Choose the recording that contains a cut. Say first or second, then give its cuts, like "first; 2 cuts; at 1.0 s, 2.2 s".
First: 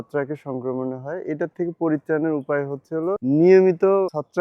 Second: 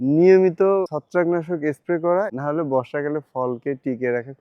second; 1 cut; at 2.4 s